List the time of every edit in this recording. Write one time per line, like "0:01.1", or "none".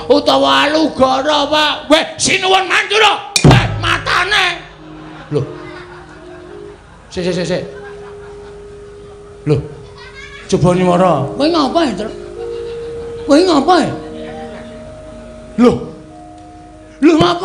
0:05.2